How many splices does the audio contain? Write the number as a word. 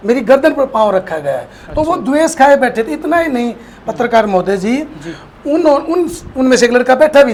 zero